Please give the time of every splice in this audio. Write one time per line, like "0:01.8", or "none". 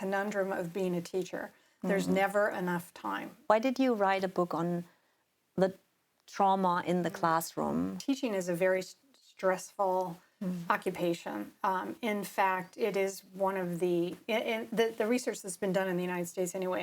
0:03.3
0:08.0